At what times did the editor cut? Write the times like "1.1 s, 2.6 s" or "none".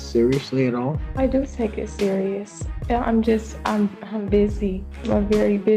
1.0 s, 4.9 s